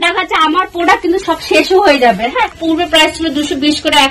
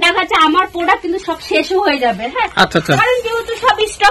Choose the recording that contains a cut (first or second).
first